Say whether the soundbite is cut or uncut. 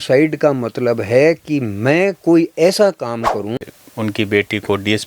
cut